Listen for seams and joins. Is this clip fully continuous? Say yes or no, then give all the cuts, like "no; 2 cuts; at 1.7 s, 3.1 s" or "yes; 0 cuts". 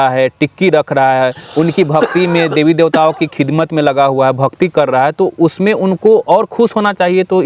yes; 0 cuts